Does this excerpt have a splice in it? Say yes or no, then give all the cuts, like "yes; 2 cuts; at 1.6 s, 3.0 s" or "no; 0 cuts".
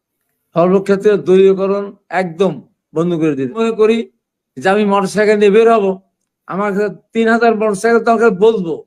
yes; 1 cut; at 3.6 s